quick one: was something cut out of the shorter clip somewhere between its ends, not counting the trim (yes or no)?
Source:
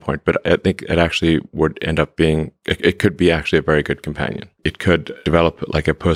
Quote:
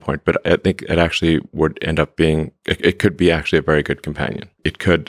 no